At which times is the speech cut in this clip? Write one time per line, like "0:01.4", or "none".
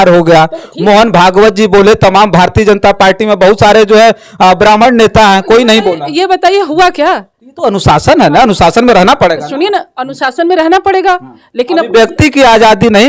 none